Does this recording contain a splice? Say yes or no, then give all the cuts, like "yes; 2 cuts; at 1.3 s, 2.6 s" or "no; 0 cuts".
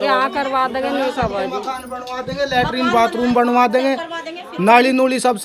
no; 0 cuts